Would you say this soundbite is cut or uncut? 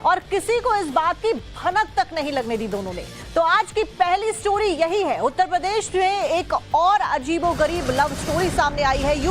cut